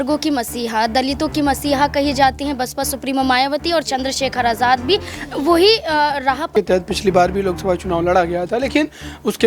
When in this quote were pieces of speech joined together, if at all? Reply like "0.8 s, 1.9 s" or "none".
6.5 s